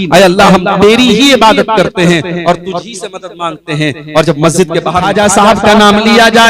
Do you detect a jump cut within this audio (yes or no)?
yes